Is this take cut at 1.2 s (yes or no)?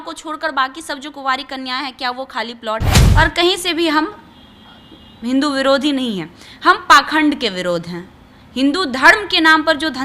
no